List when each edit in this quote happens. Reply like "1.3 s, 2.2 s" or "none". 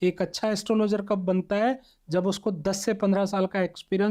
none